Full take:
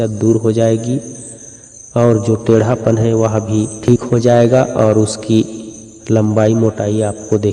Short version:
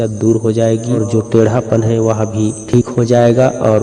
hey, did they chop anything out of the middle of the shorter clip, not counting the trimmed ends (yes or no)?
yes